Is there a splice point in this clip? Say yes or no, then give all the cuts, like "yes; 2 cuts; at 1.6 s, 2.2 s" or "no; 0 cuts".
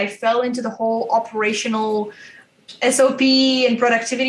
no; 0 cuts